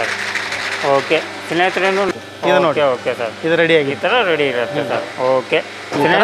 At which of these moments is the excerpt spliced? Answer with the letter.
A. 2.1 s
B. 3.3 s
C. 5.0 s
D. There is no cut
A